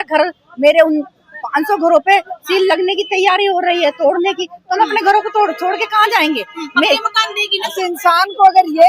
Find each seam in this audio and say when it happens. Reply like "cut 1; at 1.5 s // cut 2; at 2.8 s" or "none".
cut 1; at 7.7 s